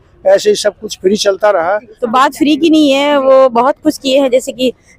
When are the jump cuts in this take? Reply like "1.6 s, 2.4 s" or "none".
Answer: 1.9 s